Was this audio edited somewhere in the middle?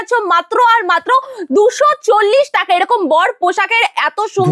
no; 0 cuts

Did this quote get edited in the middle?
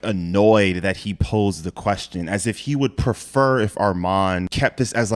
no; 0 cuts

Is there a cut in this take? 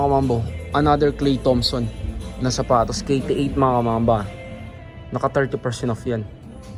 no; 0 cuts

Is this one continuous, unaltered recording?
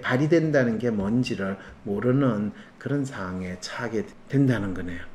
no; 1 cut; at 4.2 s

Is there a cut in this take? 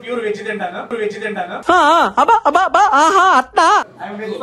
no; 0 cuts

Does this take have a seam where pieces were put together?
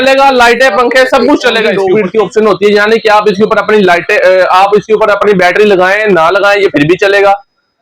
yes; 1 cut; at 1.8 s

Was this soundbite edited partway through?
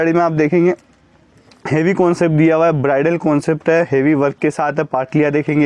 no; 0 cuts

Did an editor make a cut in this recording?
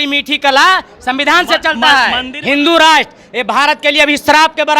yes; 1 cut; at 2.3 s

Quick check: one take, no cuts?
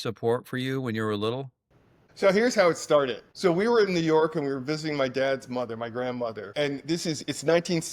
yes; 0 cuts

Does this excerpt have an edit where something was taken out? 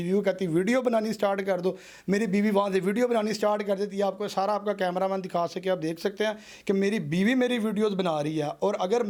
no; 0 cuts

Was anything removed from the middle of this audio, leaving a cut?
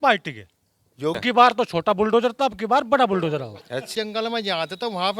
yes; 2 cuts; at 1.2 s, 3.9 s

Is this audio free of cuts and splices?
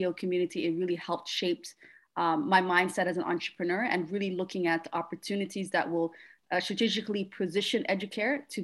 yes; 0 cuts

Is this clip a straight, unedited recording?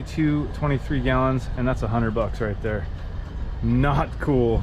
yes; 0 cuts

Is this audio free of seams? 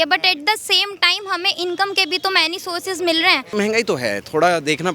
no; 1 cut; at 3.5 s

